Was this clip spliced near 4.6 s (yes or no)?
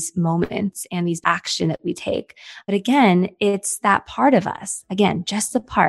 no